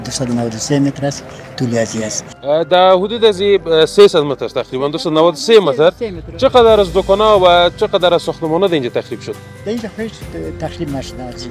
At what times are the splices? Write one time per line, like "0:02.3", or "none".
0:02.3